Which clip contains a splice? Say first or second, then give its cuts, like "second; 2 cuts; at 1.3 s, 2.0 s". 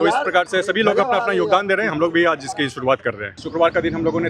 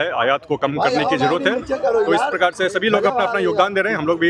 first; 1 cut; at 3.4 s